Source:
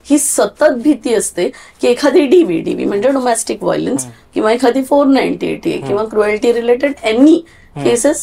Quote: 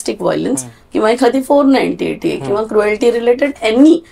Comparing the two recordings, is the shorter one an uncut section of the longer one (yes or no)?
yes